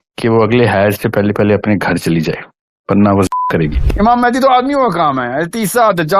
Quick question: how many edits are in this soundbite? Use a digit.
1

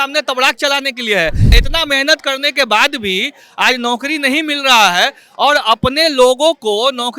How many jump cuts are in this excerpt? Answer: 1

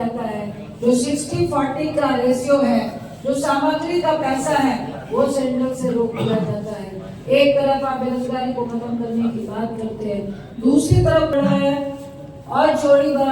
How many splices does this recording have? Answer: 1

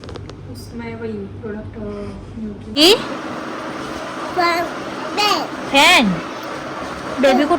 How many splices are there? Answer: 1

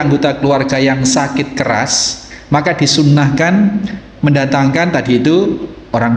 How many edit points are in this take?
0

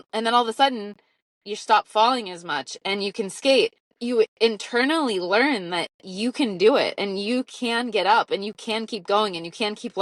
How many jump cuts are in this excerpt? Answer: 1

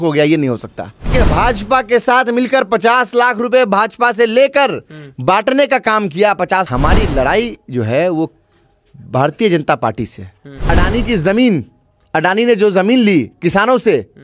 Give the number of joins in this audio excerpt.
3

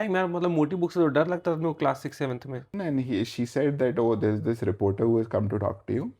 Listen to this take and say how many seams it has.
1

